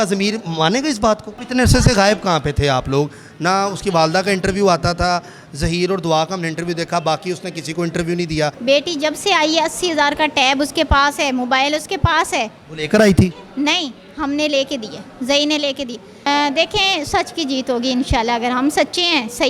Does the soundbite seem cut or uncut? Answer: cut